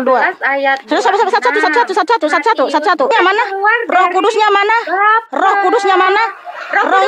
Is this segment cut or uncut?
cut